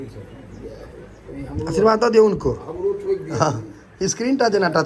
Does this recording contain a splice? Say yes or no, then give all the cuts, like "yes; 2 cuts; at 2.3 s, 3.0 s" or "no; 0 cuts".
no; 0 cuts